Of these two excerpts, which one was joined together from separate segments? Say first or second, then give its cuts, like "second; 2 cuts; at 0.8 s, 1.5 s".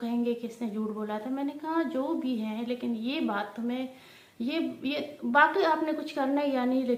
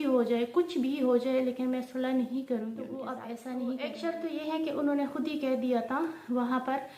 second; 1 cut; at 3.1 s